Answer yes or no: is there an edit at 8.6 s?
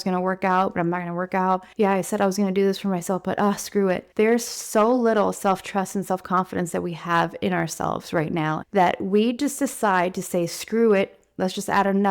yes